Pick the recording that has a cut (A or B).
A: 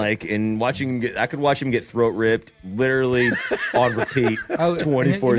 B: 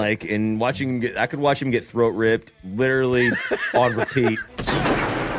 B